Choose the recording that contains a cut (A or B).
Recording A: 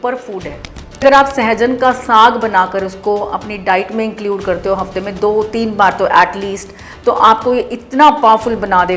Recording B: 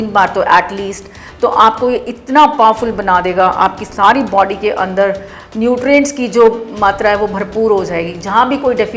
A